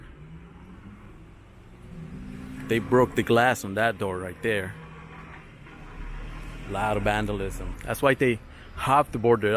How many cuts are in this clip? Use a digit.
1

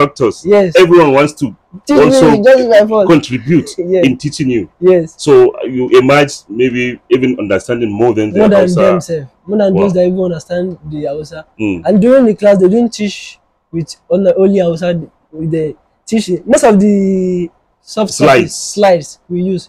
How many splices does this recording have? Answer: 0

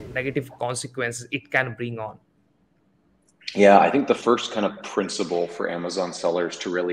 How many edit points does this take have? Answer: 0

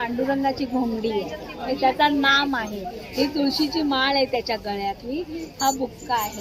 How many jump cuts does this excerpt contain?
0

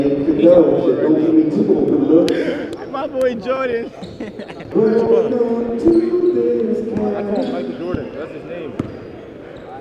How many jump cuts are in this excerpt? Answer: 1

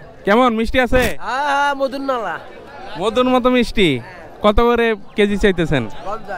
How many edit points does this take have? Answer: 0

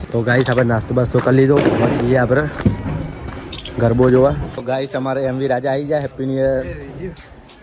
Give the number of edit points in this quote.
1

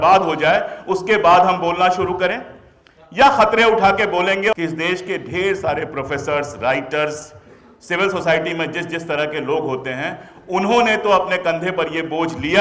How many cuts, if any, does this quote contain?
1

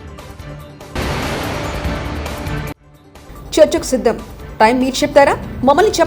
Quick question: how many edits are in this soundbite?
2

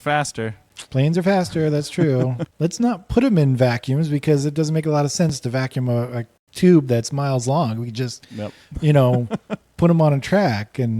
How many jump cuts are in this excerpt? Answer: 1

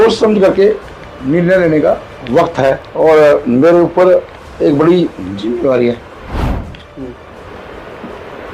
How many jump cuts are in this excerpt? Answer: 2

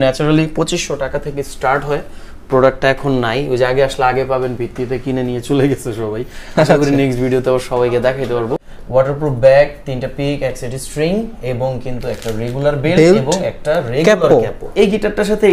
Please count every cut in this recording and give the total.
2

